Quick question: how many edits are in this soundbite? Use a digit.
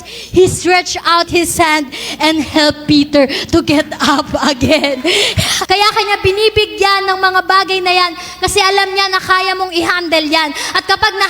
1